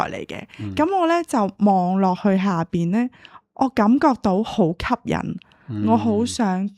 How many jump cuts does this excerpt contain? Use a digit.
0